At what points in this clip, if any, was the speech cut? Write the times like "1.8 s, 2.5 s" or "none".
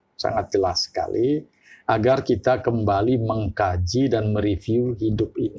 none